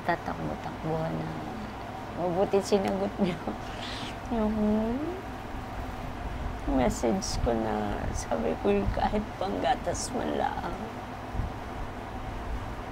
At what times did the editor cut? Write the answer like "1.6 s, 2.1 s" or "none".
none